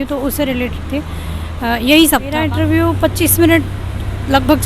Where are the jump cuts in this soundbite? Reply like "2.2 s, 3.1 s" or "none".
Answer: 2.4 s